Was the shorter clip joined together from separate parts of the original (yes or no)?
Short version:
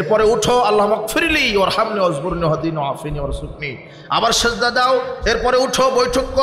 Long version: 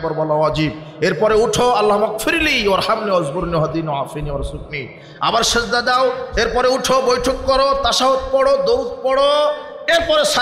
no